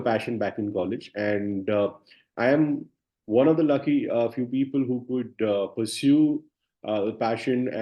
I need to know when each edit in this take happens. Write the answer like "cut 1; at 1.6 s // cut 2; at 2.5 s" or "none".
none